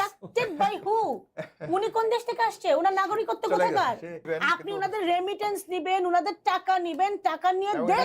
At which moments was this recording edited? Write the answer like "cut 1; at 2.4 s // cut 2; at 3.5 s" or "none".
cut 1; at 4.2 s